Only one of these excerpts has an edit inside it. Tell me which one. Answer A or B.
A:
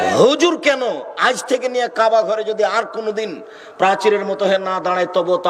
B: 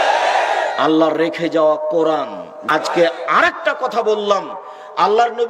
B